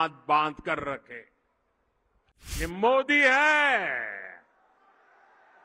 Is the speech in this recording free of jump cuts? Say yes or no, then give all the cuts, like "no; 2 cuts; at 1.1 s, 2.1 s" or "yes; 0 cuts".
no; 1 cut; at 2.6 s